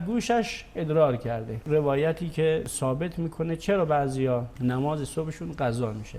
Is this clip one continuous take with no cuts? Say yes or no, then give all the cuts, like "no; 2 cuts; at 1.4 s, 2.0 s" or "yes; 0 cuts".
no; 1 cut; at 1.5 s